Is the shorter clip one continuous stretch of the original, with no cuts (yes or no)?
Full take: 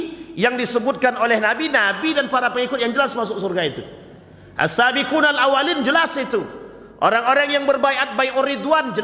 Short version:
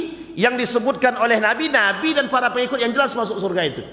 yes